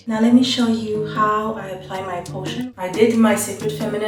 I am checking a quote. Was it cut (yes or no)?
yes